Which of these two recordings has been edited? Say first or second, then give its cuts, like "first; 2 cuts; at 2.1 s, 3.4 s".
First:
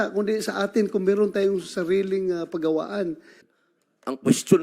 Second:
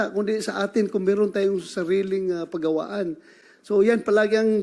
first; 1 cut; at 3.5 s